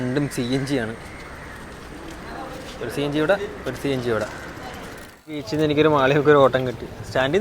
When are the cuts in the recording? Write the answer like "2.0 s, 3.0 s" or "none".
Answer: 5.5 s